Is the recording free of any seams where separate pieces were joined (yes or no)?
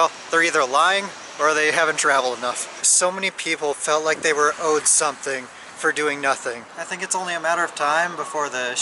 no